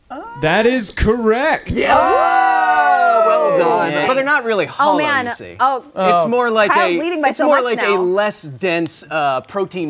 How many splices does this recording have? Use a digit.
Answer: 1